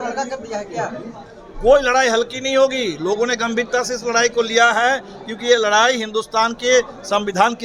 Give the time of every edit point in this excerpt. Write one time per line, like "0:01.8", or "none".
none

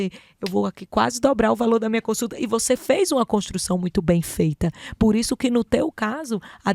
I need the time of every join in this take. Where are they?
none

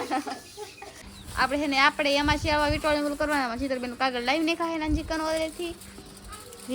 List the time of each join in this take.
0:01.1

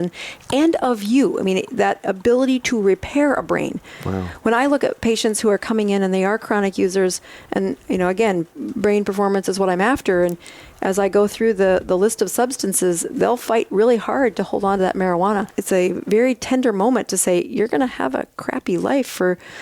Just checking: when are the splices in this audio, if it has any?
0:08.6
0:15.5

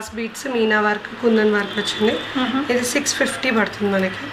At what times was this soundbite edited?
none

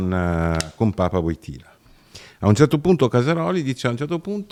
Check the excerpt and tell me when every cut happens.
none

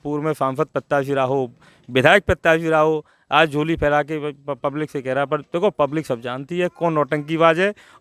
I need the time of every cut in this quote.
none

